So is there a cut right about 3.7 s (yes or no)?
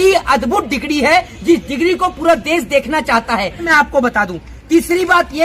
yes